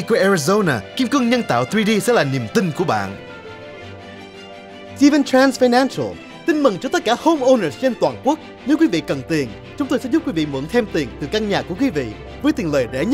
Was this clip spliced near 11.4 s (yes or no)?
no